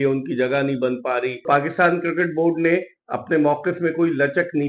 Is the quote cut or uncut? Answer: cut